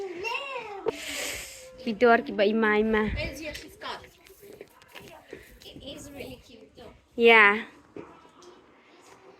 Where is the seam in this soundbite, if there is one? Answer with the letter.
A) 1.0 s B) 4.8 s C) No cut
A